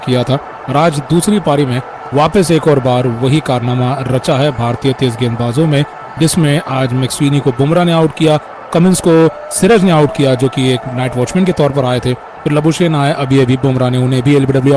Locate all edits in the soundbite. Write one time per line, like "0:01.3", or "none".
none